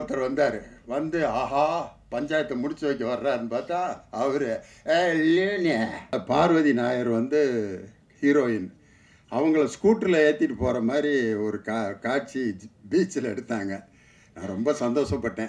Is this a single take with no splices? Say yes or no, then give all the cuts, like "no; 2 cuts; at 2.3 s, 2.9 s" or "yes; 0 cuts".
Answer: no; 1 cut; at 6.2 s